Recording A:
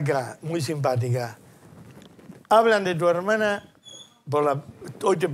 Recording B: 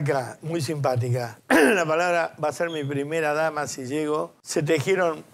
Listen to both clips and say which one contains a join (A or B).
B